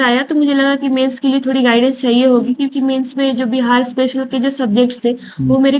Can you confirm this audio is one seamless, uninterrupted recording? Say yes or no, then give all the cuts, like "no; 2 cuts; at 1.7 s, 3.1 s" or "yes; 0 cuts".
yes; 0 cuts